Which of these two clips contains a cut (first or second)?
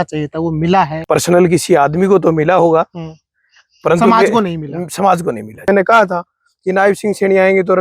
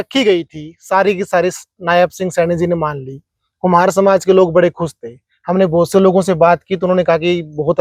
first